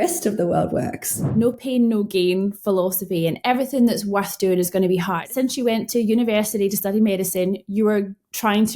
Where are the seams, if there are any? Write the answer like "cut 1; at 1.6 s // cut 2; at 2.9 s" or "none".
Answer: cut 1; at 1.2 s // cut 2; at 5.2 s